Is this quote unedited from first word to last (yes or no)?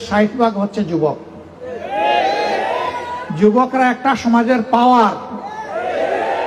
yes